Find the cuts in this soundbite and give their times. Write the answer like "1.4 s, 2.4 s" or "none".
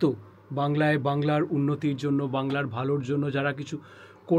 none